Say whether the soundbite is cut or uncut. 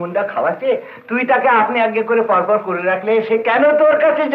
uncut